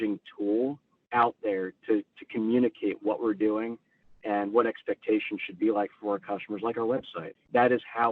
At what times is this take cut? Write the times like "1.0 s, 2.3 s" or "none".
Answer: 0.9 s, 7.2 s